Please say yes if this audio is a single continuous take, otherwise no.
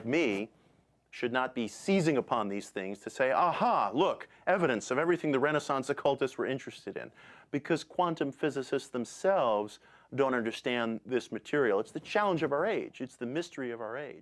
no